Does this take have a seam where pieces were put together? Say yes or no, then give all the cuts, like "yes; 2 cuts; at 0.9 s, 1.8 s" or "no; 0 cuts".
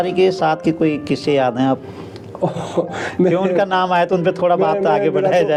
no; 0 cuts